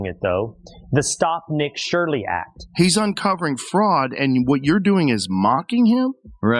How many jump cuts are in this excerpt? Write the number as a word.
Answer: one